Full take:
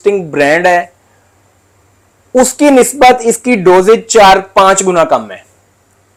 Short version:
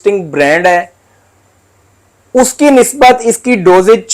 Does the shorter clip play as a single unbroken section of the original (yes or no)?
yes